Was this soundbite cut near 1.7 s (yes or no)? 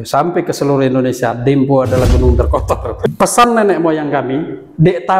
no